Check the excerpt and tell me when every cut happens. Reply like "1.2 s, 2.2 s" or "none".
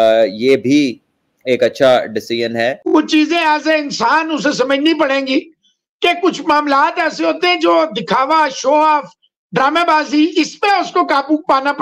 2.8 s